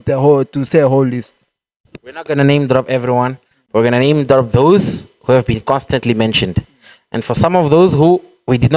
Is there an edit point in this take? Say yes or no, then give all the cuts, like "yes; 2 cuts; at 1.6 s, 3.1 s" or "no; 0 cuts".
no; 0 cuts